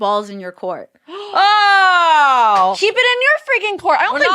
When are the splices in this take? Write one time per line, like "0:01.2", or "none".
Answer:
0:02.8